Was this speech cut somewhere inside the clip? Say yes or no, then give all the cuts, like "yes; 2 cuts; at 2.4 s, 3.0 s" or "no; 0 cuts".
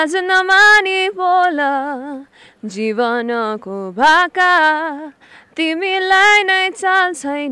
no; 0 cuts